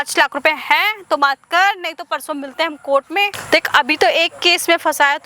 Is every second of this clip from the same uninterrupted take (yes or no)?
yes